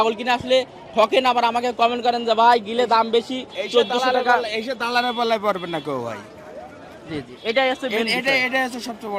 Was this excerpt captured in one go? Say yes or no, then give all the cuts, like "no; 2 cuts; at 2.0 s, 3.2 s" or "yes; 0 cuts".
yes; 0 cuts